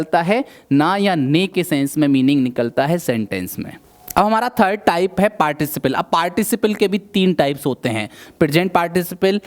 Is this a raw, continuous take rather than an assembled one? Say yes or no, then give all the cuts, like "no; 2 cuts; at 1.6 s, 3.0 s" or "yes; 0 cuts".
yes; 0 cuts